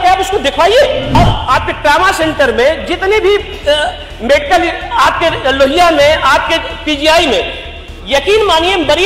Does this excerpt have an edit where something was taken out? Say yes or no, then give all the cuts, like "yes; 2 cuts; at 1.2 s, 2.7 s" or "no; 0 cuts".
yes; 1 cut; at 1.2 s